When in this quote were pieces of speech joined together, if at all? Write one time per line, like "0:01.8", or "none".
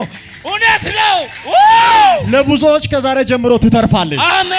0:02.2

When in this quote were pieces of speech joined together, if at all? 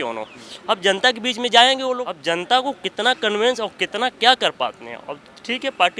0:02.1

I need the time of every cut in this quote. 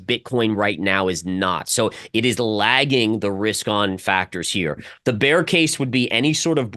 0:04.9

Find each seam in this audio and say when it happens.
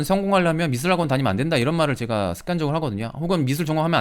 none

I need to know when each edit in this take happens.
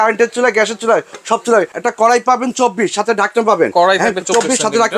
0:01.7

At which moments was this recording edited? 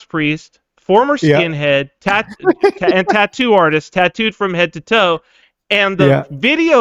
none

